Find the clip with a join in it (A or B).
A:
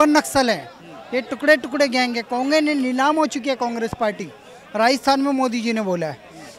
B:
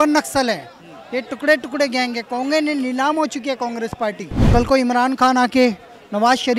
B